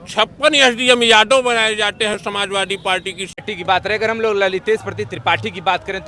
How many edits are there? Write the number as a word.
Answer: one